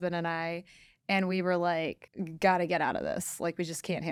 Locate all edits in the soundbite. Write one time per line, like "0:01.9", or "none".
none